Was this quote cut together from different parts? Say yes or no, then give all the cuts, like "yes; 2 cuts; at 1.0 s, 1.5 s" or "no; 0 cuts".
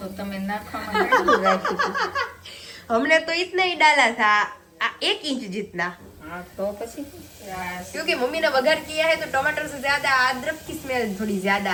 no; 0 cuts